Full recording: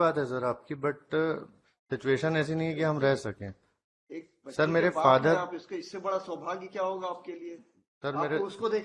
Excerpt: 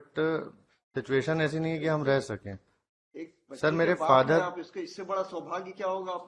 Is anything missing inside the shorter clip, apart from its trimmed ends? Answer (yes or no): no